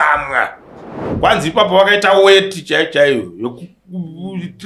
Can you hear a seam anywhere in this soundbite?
yes; 1 cut; at 1.0 s

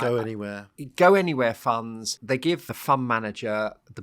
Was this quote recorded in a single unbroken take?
no; 1 cut; at 2.5 s

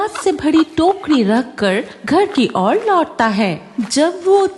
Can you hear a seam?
no; 0 cuts

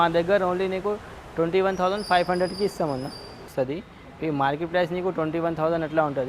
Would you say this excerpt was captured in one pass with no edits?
no; 1 cut; at 3.5 s

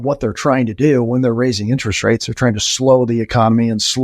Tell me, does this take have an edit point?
no; 0 cuts

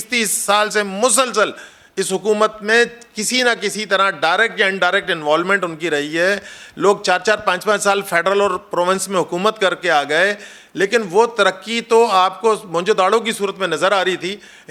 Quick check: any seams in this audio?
no; 0 cuts

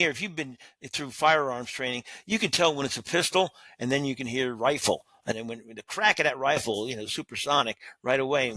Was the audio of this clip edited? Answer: no; 0 cuts

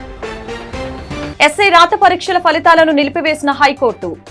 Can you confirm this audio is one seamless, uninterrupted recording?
no; 1 cut; at 1.2 s

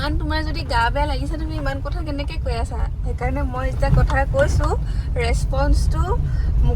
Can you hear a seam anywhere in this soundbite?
no; 0 cuts

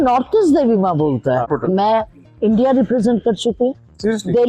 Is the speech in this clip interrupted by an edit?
yes; 1 cut; at 1.5 s

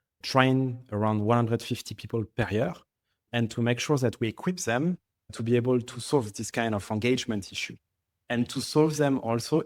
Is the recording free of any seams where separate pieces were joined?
yes; 0 cuts

